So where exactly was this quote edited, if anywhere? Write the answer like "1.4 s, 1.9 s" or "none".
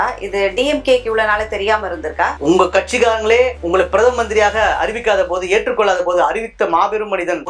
2.4 s